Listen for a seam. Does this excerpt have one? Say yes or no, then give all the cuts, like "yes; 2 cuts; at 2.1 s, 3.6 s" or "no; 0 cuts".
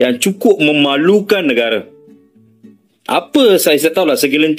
no; 0 cuts